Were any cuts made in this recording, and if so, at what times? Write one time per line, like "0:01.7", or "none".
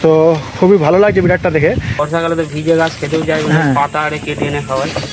0:01.9